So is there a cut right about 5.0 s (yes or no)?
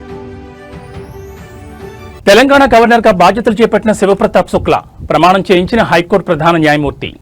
no